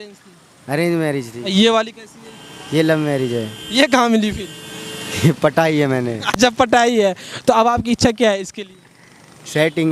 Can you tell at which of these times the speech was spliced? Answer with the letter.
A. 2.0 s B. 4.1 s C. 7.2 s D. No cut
D